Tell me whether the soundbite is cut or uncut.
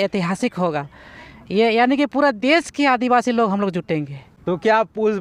uncut